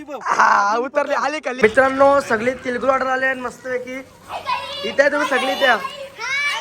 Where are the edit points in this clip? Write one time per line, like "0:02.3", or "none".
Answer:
0:01.5